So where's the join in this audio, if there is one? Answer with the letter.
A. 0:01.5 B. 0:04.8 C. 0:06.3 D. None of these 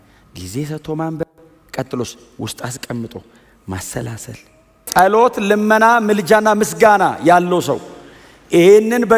B